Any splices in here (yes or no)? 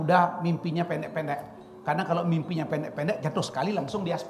no